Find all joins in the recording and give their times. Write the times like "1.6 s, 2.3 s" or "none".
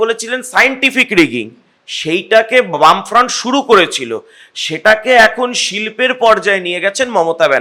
none